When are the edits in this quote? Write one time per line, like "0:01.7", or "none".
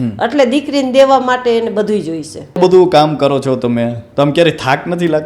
0:02.6